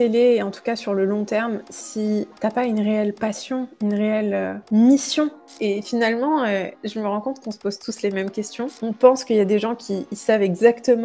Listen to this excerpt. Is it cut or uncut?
cut